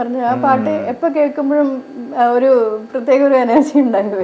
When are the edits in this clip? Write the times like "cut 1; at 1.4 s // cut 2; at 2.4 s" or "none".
none